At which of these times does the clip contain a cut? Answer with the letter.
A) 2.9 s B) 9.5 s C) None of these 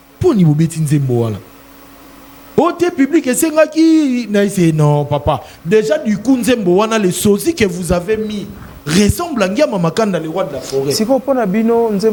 C